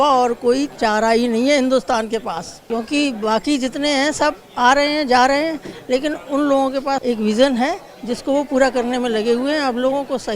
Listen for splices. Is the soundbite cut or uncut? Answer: cut